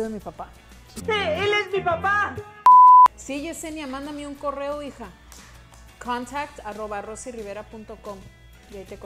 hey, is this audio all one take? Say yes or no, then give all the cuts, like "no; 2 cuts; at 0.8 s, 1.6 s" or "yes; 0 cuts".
yes; 0 cuts